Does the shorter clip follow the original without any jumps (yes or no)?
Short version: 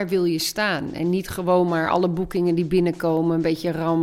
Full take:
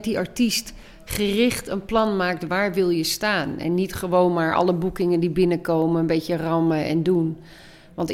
yes